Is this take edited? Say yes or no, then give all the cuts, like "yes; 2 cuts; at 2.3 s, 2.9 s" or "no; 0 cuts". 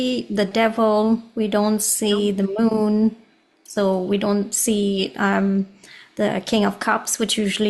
no; 0 cuts